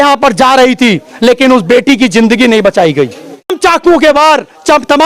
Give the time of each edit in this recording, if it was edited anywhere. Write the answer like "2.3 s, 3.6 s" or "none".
3.5 s